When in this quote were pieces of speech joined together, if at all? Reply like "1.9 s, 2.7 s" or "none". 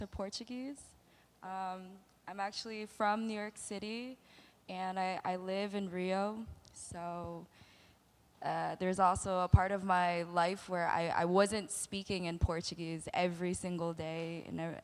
none

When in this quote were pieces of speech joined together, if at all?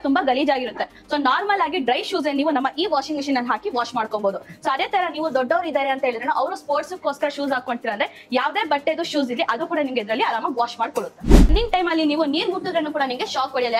11.5 s

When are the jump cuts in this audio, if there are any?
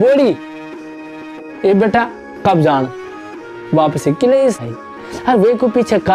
4.6 s

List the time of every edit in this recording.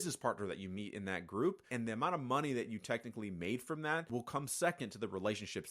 1.7 s

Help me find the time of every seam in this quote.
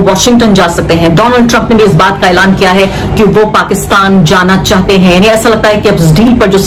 none

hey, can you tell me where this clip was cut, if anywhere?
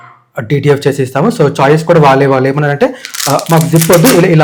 none

